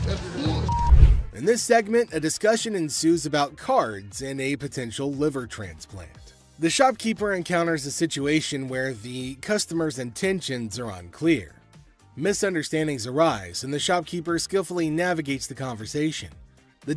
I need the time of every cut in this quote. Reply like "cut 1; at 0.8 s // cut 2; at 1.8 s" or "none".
none